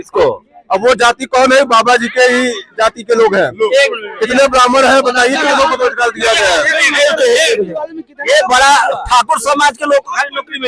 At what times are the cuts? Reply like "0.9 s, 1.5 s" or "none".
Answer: none